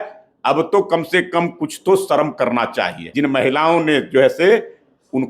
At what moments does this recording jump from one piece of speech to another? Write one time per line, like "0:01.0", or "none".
0:03.0